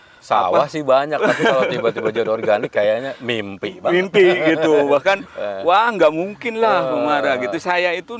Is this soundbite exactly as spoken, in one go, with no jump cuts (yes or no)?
yes